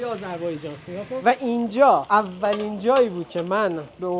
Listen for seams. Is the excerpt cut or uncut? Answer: cut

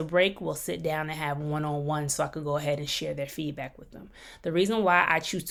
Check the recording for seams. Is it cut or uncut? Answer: uncut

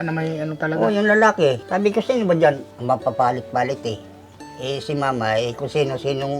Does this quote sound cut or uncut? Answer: cut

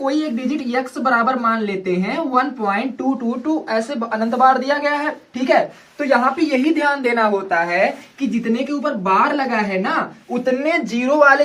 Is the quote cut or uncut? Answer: uncut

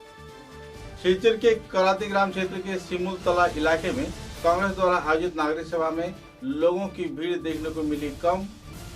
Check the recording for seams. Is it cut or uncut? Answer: cut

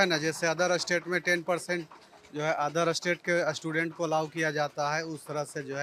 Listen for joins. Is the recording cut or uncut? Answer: uncut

